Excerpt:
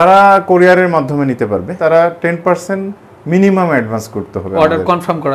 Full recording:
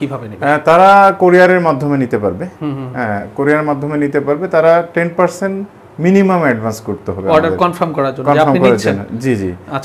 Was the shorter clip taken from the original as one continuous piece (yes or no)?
no